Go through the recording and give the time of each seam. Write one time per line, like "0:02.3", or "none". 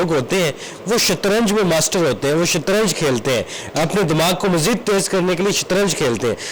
none